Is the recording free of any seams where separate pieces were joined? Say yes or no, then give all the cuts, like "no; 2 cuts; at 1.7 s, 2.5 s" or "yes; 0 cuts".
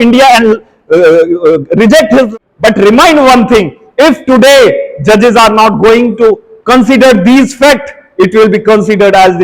no; 1 cut; at 2.3 s